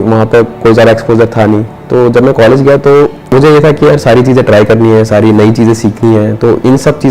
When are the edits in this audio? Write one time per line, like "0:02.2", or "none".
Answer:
0:03.3